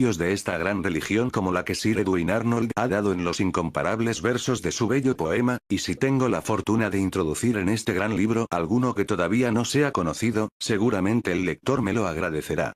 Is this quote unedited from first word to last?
no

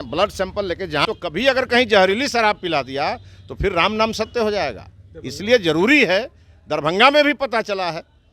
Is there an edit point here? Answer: yes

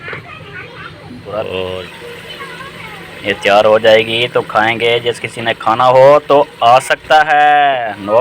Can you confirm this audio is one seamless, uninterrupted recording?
no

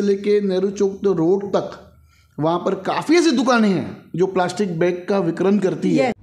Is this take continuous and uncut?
yes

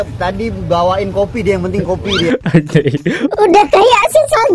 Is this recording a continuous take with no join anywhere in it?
yes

